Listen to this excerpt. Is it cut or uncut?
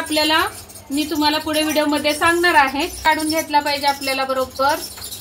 cut